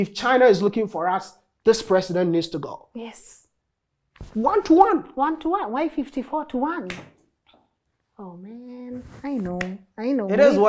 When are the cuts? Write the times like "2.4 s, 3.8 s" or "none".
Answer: none